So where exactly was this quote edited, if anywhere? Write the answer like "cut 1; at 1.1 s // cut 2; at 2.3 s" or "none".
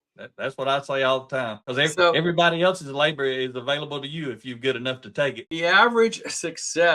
cut 1; at 1.6 s // cut 2; at 5.5 s